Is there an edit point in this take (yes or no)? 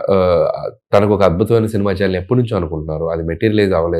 no